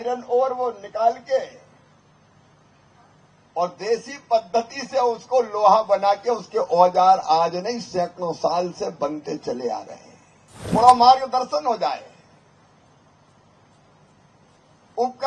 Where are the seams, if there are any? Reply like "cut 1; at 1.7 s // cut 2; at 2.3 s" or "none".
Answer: cut 1; at 10.6 s